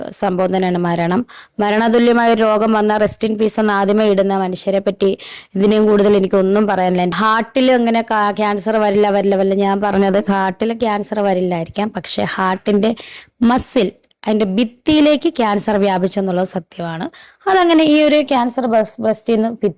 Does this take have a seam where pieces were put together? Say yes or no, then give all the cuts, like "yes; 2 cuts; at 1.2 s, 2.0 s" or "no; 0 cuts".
yes; 2 cuts; at 4.9 s, 7.1 s